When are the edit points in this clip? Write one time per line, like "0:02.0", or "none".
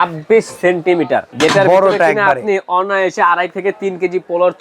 0:01.3